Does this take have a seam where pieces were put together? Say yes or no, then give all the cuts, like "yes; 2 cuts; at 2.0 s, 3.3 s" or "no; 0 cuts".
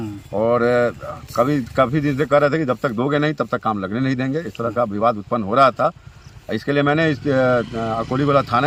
no; 0 cuts